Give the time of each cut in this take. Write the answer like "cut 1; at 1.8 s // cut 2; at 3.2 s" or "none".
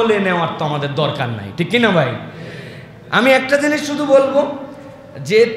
none